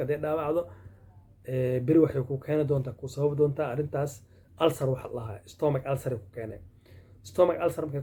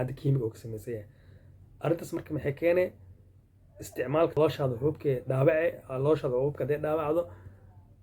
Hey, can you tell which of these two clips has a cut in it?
second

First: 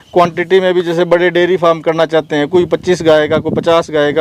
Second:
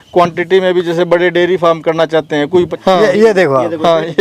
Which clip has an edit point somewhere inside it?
second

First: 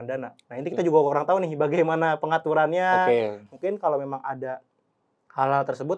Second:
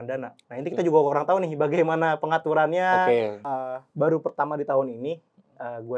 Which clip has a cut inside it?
second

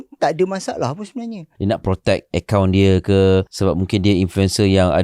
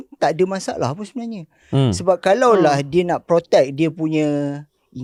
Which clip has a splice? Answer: first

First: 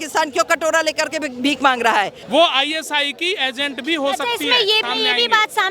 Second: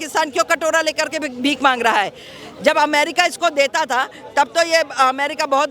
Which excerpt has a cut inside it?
first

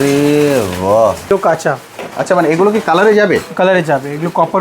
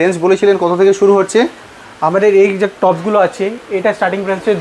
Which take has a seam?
first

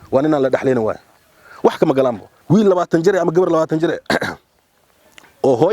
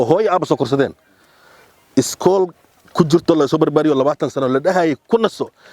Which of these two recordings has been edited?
first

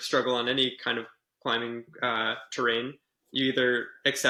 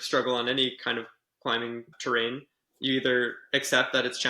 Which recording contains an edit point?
second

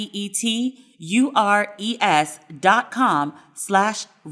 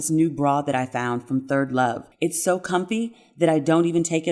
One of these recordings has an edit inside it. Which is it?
second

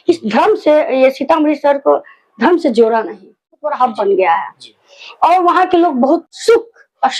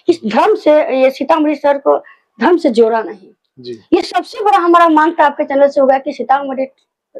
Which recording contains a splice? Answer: first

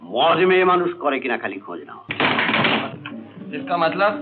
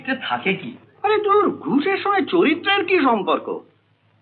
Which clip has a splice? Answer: first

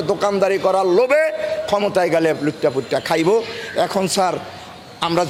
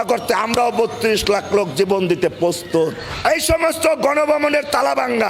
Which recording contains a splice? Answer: second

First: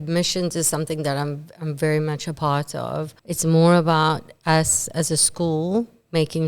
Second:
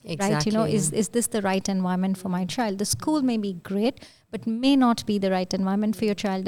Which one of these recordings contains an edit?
first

